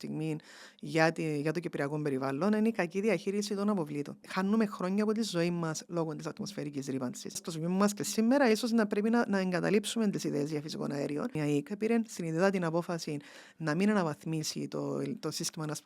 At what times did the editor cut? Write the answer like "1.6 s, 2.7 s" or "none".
4.2 s, 7.5 s, 11.4 s